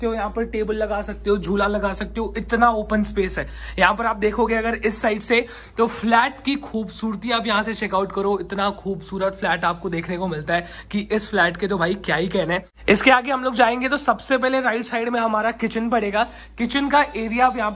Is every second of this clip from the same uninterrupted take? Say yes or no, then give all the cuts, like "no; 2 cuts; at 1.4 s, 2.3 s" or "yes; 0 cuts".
yes; 0 cuts